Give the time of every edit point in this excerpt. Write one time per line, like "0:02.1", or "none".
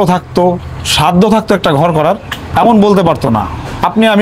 0:02.4